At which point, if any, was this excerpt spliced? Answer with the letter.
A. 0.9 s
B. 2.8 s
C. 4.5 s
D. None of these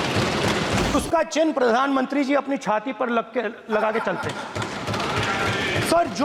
A